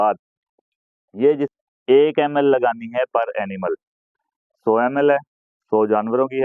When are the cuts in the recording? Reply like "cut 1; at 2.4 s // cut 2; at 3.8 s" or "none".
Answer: cut 1; at 1.5 s